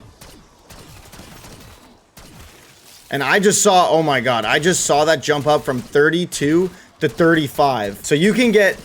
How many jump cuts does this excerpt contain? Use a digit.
0